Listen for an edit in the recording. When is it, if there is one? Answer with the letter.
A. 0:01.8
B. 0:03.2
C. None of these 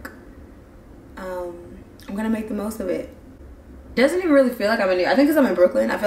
C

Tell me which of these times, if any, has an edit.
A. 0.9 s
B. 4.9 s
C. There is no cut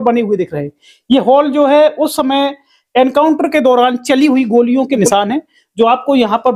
C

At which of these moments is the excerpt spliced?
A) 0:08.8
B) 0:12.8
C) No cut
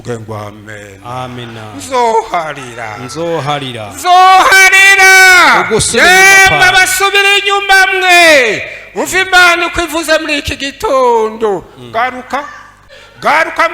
B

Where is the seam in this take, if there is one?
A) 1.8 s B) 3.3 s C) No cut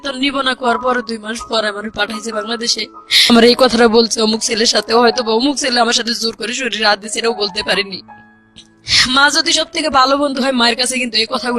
B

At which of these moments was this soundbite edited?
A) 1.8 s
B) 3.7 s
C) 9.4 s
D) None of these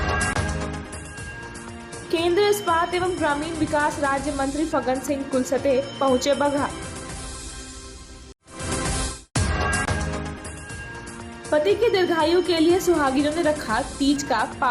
A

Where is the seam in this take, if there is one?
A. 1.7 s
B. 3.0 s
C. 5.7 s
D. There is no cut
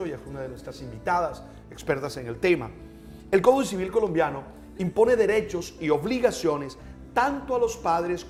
D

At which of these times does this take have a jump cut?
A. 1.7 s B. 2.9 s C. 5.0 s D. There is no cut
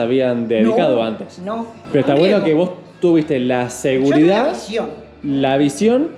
A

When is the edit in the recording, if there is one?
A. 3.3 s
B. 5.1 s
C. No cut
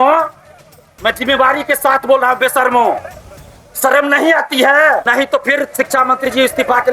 B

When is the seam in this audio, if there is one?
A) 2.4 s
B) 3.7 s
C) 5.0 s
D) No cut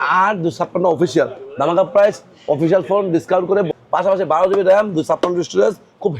B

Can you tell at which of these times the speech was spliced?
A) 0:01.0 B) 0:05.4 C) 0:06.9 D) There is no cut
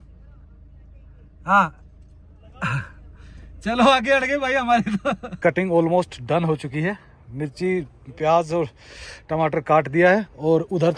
B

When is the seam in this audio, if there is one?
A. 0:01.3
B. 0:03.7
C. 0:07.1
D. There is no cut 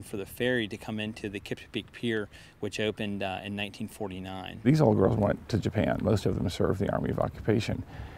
B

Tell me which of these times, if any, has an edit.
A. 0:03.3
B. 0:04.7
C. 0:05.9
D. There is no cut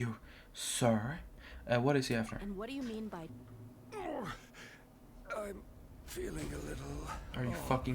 A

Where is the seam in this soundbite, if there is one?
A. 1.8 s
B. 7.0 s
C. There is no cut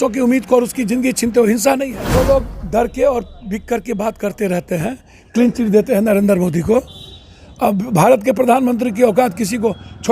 A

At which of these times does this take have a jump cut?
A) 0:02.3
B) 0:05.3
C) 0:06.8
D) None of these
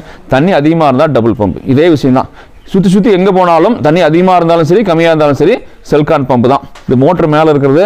C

